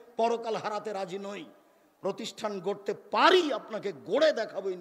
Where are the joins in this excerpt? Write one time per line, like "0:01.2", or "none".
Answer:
none